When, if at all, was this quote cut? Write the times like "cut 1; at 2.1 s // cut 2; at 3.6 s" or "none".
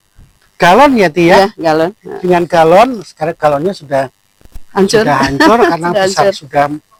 none